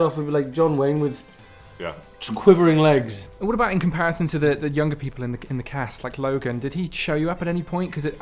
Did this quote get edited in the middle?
yes; 1 cut; at 3.2 s

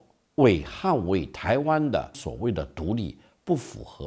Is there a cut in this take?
yes; 1 cut; at 2.2 s

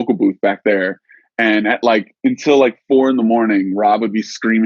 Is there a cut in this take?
no; 0 cuts

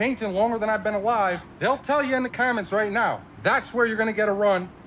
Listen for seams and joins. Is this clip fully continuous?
no; 2 cuts; at 1.5 s, 3.3 s

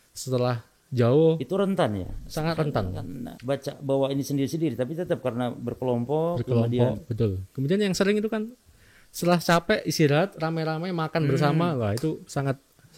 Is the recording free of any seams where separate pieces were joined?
yes; 0 cuts

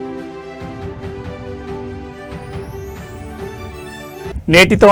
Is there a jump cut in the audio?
no; 0 cuts

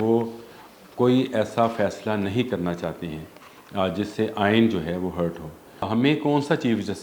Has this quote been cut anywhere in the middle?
yes; 1 cut; at 5.9 s

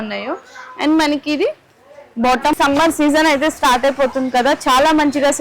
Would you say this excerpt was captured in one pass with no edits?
no; 1 cut; at 2.5 s

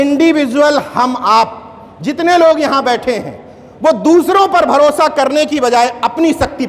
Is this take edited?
no; 0 cuts

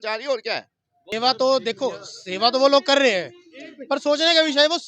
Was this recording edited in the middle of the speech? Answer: yes; 1 cut; at 1.1 s

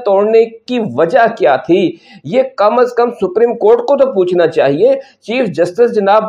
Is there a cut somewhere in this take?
no; 0 cuts

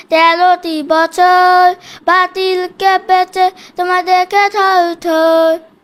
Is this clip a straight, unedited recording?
yes; 0 cuts

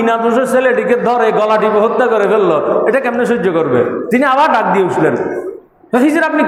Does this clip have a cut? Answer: no; 0 cuts

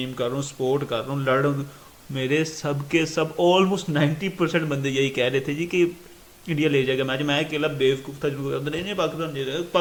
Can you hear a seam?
no; 0 cuts

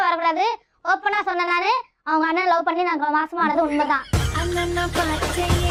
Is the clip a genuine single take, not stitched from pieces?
yes; 0 cuts

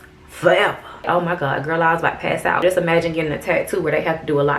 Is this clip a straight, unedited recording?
no; 2 cuts; at 1.0 s, 2.6 s

